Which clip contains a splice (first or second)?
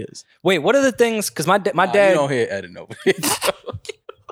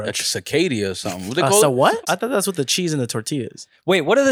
second